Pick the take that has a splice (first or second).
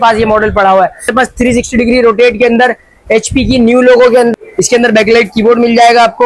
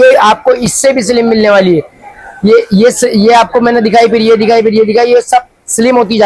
first